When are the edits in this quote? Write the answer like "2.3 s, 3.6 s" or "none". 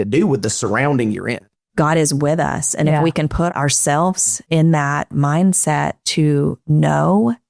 1.5 s, 4.3 s, 6.3 s